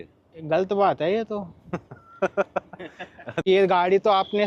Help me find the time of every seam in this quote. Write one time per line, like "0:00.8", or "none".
0:03.5